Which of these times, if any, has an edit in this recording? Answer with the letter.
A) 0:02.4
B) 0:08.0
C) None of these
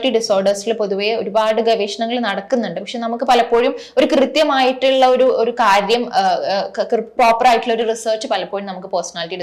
C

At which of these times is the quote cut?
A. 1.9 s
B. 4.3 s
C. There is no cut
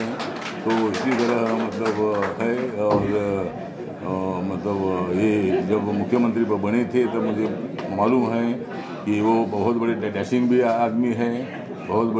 C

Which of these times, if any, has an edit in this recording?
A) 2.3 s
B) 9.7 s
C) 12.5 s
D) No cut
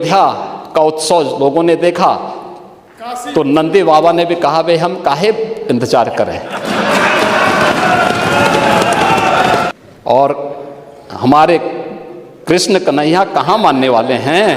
B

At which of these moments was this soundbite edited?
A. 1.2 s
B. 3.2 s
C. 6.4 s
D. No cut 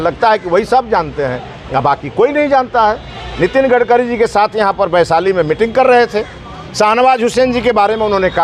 D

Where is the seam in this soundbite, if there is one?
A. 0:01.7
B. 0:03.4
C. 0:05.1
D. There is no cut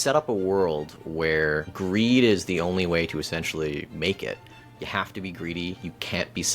A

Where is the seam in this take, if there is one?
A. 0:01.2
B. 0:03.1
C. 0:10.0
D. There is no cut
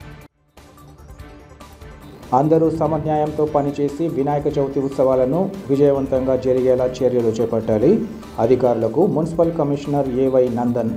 A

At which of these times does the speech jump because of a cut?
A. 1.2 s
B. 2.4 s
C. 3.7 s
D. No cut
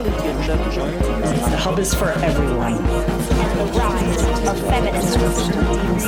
D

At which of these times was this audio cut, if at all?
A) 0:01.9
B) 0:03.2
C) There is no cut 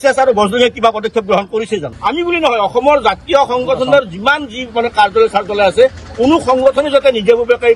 A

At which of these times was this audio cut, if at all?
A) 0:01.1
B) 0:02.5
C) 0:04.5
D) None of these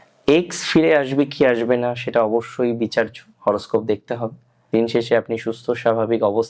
C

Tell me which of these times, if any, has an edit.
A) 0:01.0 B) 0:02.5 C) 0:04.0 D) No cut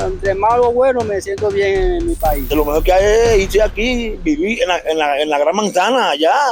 B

